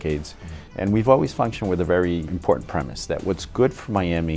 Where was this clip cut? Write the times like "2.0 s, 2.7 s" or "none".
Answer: 2.3 s